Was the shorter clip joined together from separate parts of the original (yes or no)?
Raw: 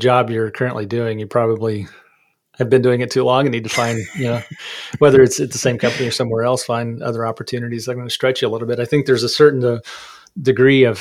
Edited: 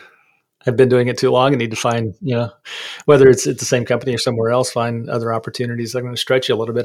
no